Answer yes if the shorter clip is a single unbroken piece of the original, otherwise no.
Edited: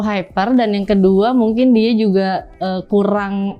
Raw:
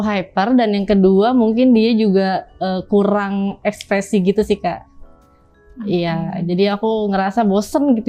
yes